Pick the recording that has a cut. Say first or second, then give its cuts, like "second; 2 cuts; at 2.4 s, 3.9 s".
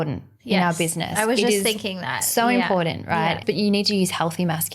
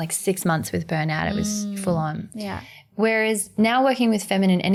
first; 1 cut; at 3.4 s